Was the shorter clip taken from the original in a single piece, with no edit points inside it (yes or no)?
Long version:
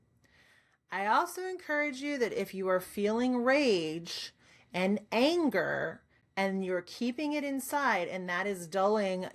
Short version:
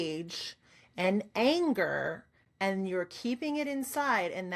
yes